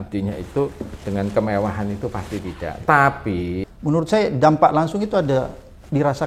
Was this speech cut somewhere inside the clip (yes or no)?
yes